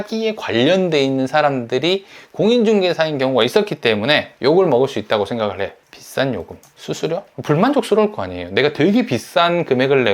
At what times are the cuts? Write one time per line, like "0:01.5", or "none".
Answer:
0:05.8
0:07.3